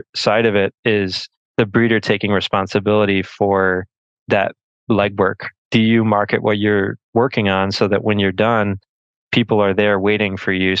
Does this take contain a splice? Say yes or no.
yes